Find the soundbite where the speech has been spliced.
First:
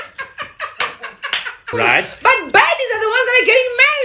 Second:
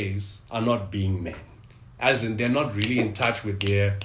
first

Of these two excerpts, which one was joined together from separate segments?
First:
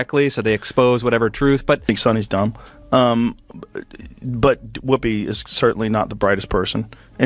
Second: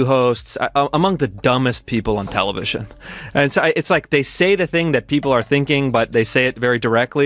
first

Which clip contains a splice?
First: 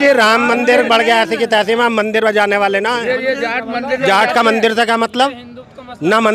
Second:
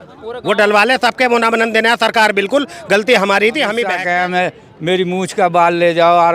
second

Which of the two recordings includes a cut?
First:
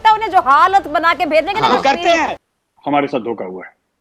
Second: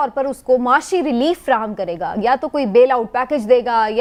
first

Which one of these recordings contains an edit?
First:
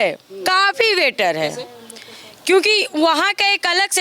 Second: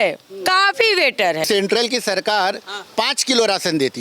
second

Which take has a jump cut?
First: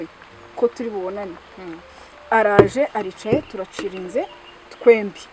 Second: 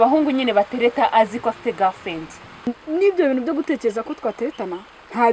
second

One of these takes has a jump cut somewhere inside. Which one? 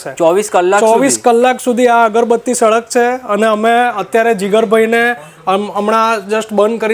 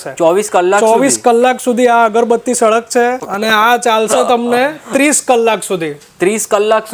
second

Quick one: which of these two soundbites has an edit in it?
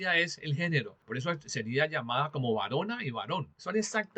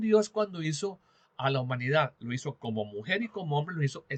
first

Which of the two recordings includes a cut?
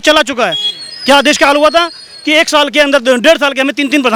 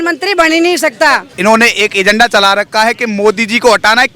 second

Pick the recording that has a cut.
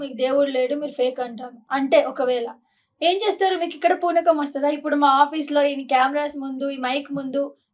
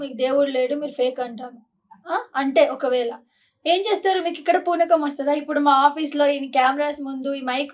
first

